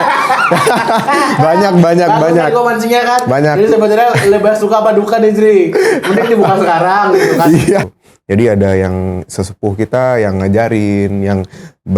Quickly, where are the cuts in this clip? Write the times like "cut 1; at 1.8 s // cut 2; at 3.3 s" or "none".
cut 1; at 7.9 s